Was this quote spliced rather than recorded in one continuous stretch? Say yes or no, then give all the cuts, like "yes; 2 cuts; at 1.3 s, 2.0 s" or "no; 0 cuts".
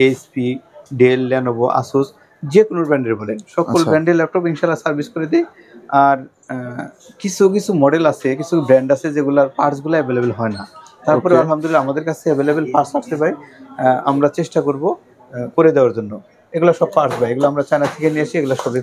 no; 0 cuts